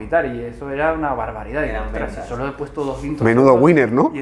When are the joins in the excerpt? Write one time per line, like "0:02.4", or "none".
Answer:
none